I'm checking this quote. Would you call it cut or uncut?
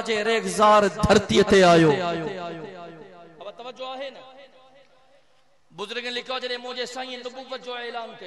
uncut